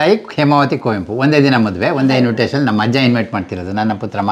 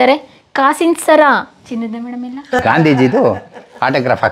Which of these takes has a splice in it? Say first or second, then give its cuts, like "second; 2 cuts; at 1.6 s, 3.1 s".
second; 1 cut; at 2.6 s